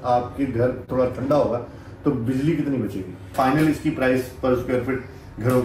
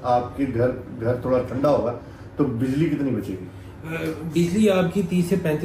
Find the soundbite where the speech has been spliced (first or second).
first